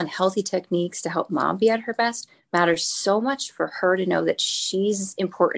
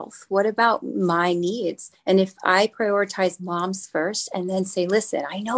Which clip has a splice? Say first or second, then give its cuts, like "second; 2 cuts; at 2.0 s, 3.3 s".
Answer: second; 1 cut; at 1.9 s